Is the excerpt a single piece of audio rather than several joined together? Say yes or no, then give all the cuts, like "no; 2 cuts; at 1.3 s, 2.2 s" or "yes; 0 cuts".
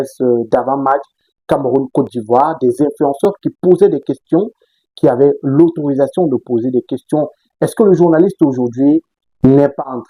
yes; 0 cuts